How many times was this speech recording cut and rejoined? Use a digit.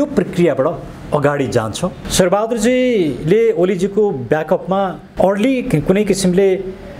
1